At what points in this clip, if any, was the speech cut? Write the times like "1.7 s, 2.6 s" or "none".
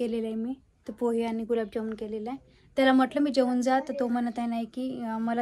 none